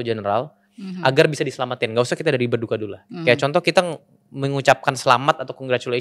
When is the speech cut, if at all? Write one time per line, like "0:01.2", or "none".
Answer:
none